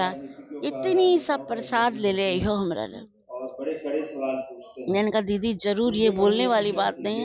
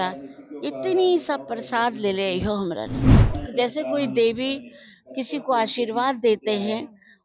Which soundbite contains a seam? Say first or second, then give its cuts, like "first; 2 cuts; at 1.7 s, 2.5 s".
second; 1 cut; at 3.3 s